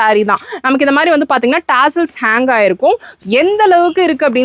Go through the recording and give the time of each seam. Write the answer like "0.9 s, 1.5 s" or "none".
3.1 s